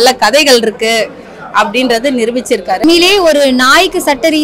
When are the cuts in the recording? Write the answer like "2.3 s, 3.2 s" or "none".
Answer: 2.8 s